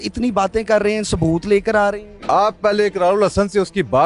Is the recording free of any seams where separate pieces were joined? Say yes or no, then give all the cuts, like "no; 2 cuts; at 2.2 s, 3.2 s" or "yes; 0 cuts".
no; 1 cut; at 2.1 s